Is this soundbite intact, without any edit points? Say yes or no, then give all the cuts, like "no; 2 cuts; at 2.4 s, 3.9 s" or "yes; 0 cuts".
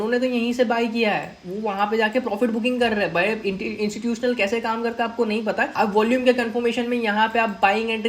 no; 1 cut; at 5.7 s